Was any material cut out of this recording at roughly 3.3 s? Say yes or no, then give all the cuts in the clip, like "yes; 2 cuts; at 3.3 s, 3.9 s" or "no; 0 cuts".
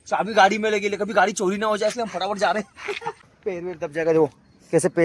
yes; 1 cut; at 3.3 s